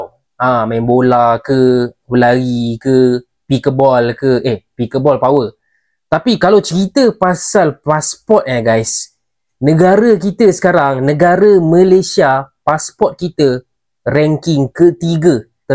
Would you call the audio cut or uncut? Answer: uncut